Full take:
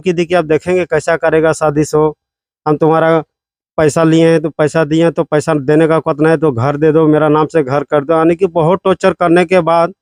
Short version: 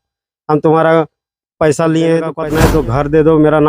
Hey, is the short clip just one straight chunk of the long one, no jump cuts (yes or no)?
no